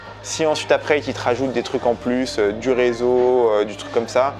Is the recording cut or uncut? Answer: uncut